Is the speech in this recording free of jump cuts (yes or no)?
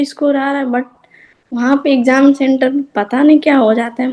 yes